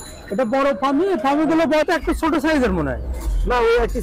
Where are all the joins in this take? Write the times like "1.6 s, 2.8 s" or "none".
2.0 s